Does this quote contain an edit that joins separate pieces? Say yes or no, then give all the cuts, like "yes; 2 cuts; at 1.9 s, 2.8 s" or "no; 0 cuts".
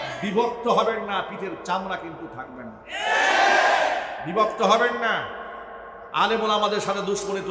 no; 0 cuts